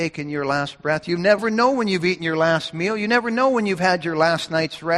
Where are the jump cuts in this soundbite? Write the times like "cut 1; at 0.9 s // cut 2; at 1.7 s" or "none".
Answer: cut 1; at 1.4 s